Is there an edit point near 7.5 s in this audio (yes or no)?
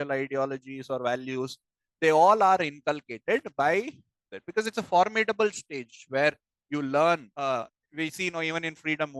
yes